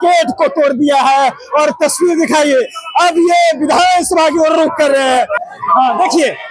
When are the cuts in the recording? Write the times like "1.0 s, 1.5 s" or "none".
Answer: 5.4 s